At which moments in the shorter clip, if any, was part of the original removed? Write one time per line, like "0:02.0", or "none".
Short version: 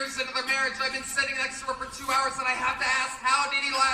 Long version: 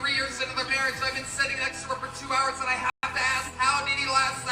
0:02.7